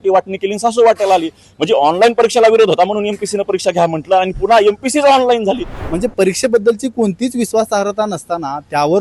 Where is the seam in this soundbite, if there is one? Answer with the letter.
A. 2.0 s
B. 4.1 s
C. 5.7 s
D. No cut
C